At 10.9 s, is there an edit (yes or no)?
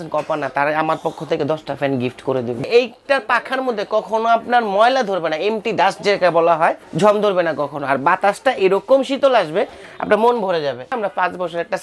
yes